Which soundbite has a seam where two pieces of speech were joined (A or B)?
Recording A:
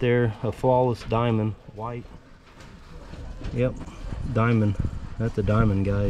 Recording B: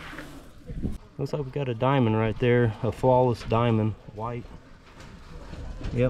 B